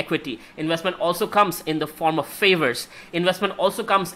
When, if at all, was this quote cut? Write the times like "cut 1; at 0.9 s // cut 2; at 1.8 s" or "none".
none